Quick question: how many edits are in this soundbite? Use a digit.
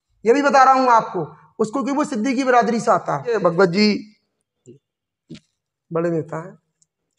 1